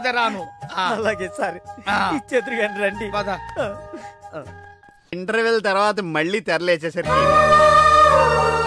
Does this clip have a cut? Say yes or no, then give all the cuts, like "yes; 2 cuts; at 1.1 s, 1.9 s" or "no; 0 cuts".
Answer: yes; 1 cut; at 5.1 s